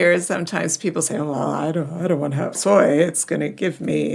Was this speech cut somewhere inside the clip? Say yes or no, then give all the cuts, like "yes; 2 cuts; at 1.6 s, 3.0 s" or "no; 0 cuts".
yes; 1 cut; at 2.5 s